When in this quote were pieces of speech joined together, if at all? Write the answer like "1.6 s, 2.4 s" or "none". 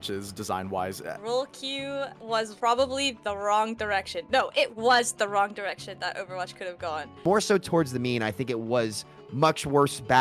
1.2 s, 2.3 s, 7.1 s